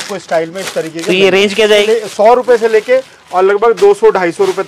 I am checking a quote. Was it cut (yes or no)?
yes